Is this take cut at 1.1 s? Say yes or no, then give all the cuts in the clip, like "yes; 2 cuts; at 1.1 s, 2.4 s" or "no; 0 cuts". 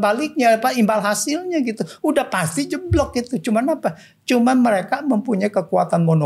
no; 0 cuts